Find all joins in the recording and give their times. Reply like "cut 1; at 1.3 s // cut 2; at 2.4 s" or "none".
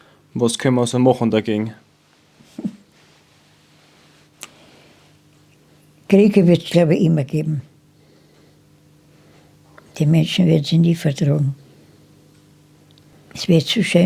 cut 1; at 13.1 s